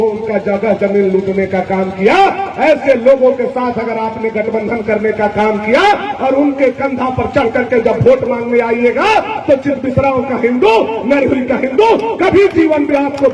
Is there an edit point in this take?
no; 0 cuts

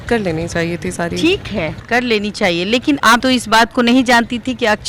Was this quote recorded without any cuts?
yes; 0 cuts

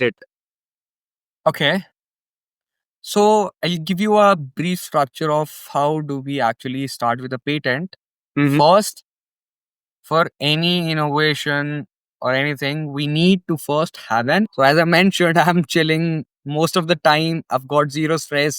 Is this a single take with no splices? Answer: no; 1 cut; at 14.5 s

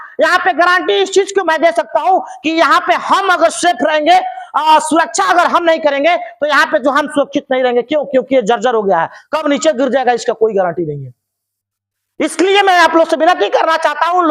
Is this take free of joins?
yes; 0 cuts

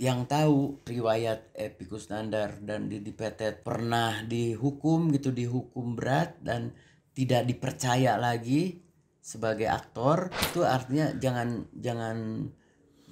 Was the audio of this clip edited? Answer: yes; 1 cut; at 10.4 s

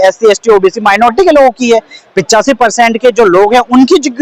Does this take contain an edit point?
no; 0 cuts

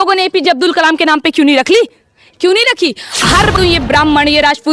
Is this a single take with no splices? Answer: no; 1 cut; at 3.5 s

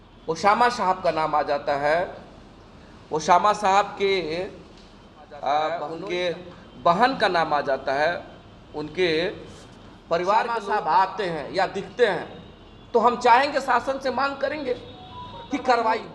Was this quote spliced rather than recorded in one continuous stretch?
yes; 2 cuts; at 5.9 s, 10.6 s

